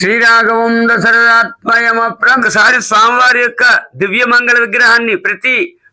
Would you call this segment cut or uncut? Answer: cut